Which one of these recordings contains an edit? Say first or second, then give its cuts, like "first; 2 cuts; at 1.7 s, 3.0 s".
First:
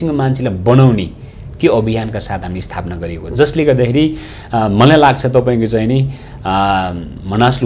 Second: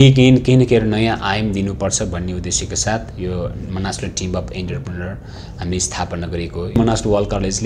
second; 1 cut; at 6.8 s